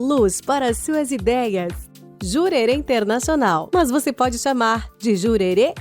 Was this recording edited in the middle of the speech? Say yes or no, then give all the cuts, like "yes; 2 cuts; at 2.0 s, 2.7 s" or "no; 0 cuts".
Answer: yes; 2 cuts; at 1.9 s, 4.9 s